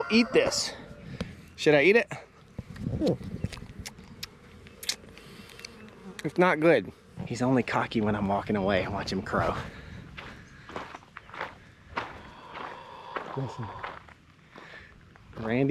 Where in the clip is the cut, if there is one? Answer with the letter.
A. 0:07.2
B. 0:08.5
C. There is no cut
A